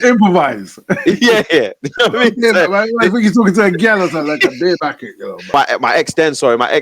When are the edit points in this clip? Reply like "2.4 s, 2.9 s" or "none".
5.5 s